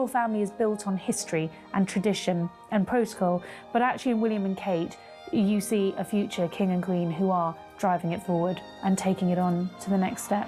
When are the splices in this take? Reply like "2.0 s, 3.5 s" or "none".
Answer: none